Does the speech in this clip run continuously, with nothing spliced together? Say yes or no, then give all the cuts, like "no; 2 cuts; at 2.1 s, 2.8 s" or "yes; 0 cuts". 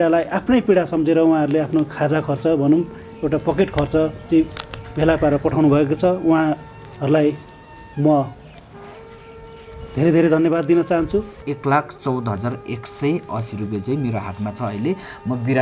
no; 1 cut; at 11.4 s